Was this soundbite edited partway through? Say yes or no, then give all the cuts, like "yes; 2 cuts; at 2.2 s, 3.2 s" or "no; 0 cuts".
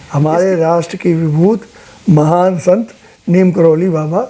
no; 0 cuts